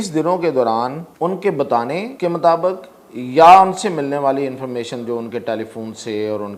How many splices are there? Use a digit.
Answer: 2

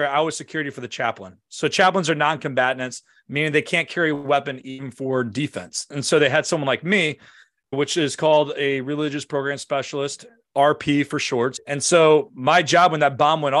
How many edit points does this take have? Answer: 1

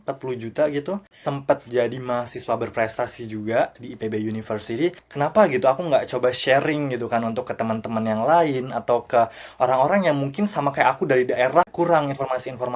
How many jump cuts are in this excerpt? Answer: 3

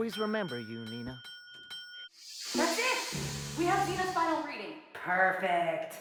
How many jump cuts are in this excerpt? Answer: 0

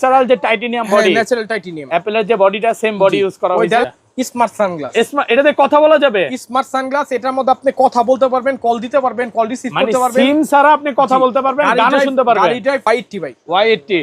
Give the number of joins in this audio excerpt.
2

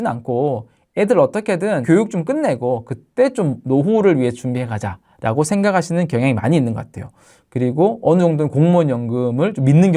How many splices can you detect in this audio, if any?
2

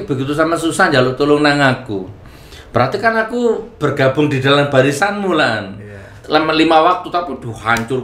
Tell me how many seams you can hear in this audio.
1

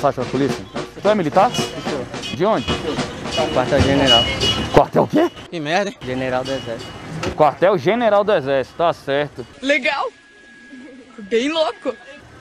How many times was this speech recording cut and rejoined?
0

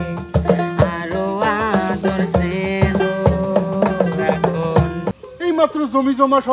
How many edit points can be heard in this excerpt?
1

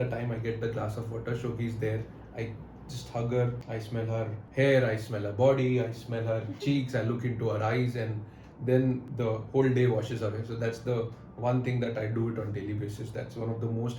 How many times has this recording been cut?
2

